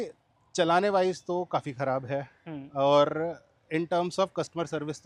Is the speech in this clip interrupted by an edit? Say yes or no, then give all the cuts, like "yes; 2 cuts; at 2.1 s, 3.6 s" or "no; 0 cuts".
no; 0 cuts